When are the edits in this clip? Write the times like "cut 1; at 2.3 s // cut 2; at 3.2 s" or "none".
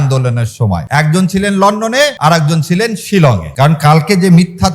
cut 1; at 0.8 s // cut 2; at 2.2 s // cut 3; at 3.5 s